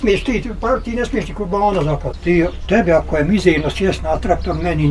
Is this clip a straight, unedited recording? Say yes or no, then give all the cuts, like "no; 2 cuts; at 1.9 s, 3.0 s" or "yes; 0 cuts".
no; 1 cut; at 2.1 s